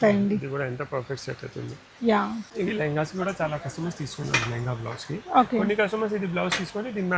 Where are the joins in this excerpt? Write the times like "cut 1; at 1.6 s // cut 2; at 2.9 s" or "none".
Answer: cut 1; at 2.5 s

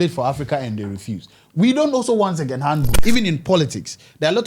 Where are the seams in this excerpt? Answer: cut 1; at 3.0 s

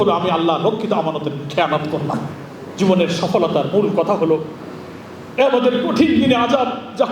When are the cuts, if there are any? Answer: cut 1; at 2.6 s

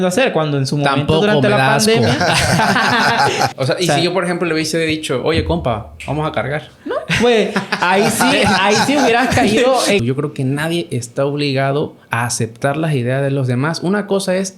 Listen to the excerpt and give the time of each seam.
cut 1; at 3.6 s // cut 2; at 10.0 s

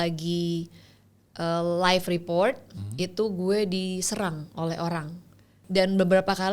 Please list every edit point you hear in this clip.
cut 1; at 5.5 s

